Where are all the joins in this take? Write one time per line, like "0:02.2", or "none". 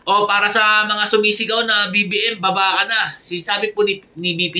none